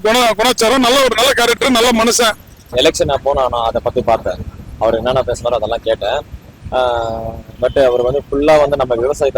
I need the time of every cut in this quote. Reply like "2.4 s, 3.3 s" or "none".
2.6 s